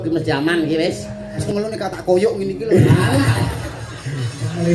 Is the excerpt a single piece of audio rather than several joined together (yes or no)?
no